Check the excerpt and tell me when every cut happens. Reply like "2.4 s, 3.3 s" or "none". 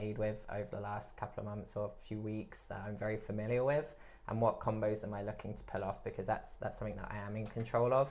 none

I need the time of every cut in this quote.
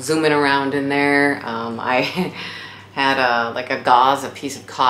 none

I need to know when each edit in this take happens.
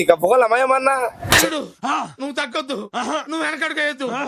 none

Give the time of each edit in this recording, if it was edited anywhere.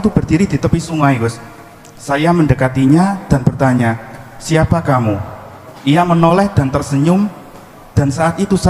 none

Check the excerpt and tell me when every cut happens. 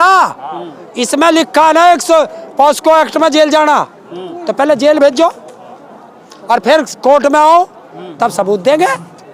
none

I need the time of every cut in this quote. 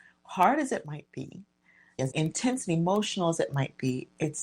1.9 s

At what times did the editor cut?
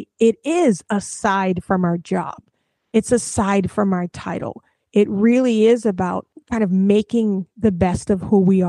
6.3 s

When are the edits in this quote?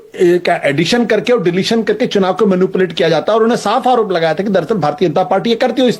none

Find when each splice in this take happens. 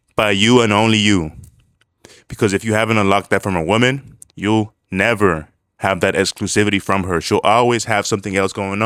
none

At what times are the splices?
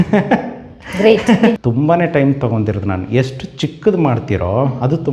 1.6 s

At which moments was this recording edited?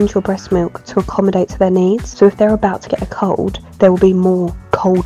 2.1 s, 3.6 s

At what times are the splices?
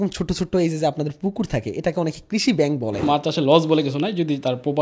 3.0 s

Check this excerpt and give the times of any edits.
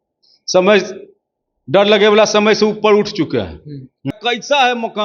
4.1 s

